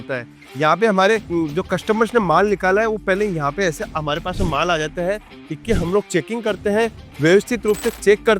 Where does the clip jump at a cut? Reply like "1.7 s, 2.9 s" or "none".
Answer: 1.3 s